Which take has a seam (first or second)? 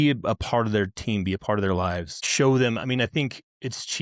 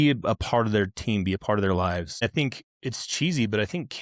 second